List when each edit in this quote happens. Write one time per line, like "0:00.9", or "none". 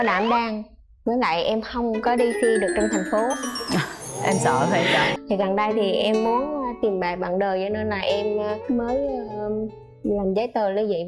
0:05.1